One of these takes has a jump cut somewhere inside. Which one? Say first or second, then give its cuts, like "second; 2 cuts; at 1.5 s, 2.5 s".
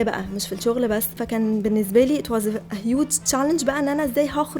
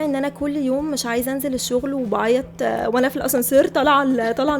first; 1 cut; at 1.2 s